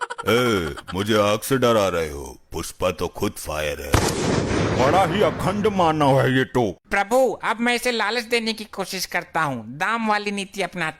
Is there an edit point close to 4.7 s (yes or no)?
no